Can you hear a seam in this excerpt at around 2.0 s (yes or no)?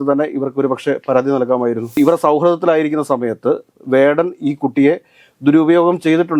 yes